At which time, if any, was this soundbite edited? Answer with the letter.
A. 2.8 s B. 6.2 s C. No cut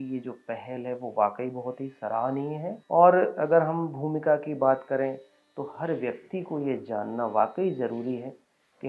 A